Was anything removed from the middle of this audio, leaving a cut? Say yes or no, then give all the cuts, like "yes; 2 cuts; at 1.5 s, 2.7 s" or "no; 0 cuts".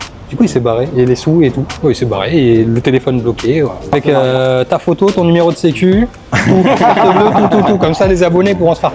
yes; 1 cut; at 3.9 s